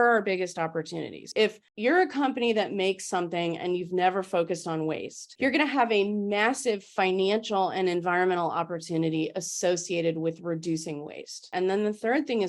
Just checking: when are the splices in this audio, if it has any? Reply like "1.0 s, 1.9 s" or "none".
none